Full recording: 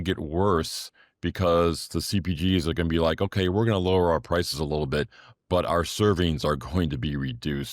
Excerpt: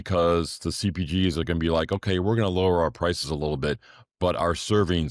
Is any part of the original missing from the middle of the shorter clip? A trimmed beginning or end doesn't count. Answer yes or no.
no